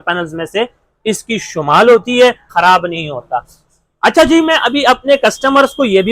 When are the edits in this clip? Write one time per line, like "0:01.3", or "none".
0:02.5